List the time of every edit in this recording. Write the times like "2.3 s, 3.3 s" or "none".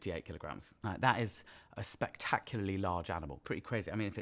none